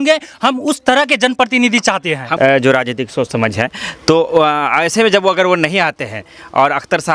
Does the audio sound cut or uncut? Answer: cut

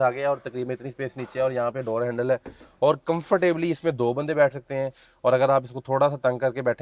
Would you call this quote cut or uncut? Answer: uncut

